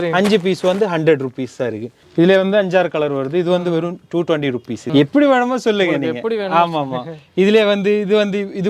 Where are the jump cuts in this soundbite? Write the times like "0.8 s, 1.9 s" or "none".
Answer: 1.9 s, 4.8 s

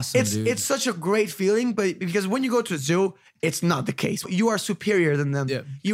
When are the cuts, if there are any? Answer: 4.2 s

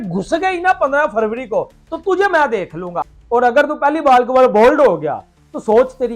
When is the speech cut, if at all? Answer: 2.9 s

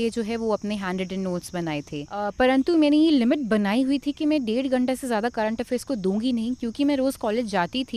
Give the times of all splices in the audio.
2.3 s

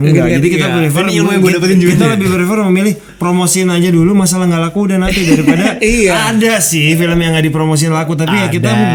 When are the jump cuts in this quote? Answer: none

